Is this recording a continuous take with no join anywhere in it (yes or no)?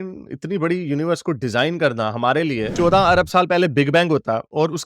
no